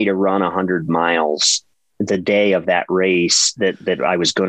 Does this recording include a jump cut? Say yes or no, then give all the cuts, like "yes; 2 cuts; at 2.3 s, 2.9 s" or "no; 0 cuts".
no; 0 cuts